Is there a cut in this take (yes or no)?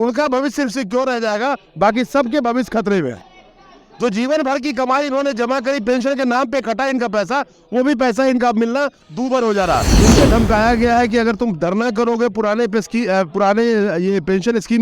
yes